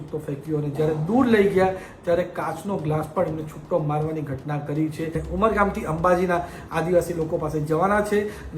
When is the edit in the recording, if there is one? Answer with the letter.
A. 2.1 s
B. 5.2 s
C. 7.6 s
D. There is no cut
B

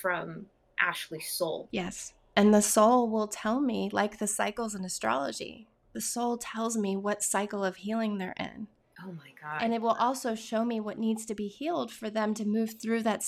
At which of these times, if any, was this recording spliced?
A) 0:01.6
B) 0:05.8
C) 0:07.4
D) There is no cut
A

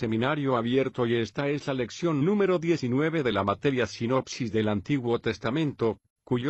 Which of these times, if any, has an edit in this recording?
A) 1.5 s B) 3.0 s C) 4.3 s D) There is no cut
D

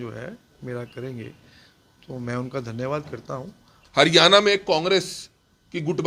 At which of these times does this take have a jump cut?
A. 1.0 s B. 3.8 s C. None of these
B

